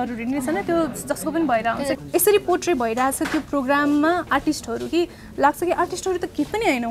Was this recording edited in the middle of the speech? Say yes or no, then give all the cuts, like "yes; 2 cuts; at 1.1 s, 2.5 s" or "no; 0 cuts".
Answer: yes; 1 cut; at 2.0 s